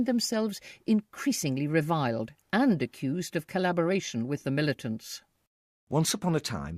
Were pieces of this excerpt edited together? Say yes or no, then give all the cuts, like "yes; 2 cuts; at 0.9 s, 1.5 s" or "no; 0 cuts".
yes; 1 cut; at 1.7 s